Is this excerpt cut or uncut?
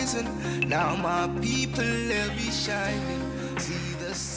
cut